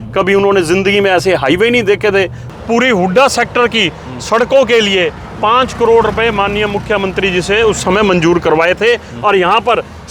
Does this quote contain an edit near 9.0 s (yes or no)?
no